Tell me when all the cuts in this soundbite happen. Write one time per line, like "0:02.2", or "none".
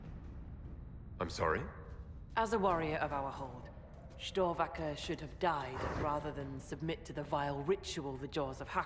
0:01.3